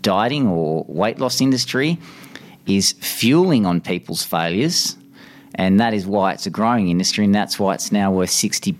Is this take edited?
no; 0 cuts

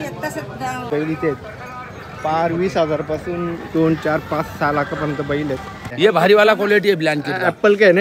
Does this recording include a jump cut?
yes; 2 cuts; at 0.9 s, 5.9 s

